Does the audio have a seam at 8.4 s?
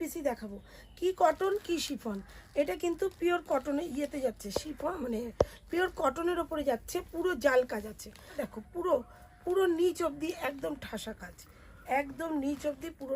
yes; 1 cut; at 8.4 s

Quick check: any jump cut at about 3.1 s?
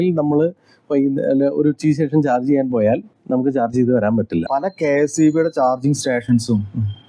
yes; 2 cuts; at 3.1 s, 4.5 s

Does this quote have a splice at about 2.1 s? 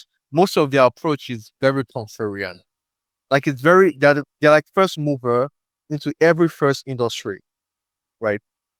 no; 0 cuts

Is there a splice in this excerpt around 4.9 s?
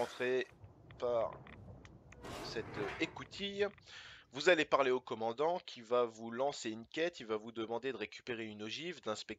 yes; 1 cut; at 4.9 s

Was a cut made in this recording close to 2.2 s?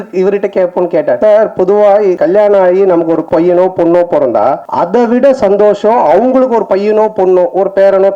yes; 4 cuts; at 1.2 s, 2.2 s, 3.2 s, 4.6 s

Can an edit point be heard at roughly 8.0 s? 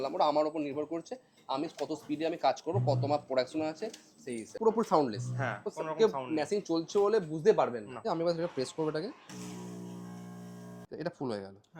yes; 3 cuts; at 4.6 s, 8.0 s, 10.8 s

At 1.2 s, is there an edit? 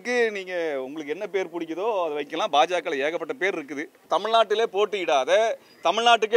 no; 1 cut; at 4.0 s

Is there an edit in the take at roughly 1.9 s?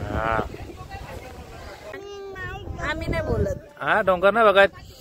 yes; 1 cut; at 1.9 s

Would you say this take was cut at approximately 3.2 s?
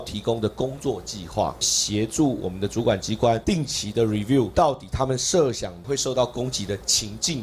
no; 2 cuts; at 1.7 s, 5.7 s

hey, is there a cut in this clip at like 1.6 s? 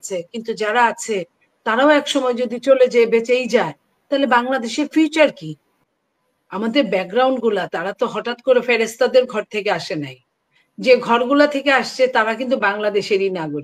no; 1 cut; at 5.9 s

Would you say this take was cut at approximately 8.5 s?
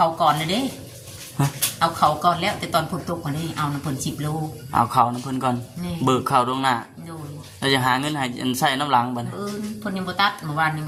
no; 0 cuts

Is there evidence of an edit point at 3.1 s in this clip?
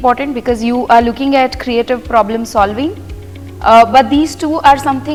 no; 0 cuts

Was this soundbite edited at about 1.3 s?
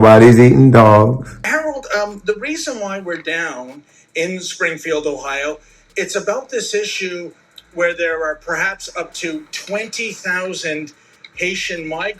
yes; 1 cut; at 1.3 s

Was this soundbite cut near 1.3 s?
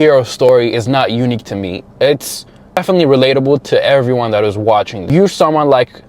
no; 2 cuts; at 2.8 s, 5.0 s

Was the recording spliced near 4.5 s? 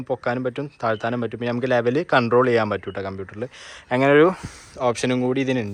no; 0 cuts

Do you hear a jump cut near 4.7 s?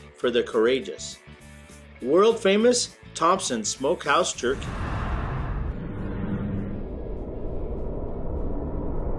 yes; 1 cut; at 4.7 s

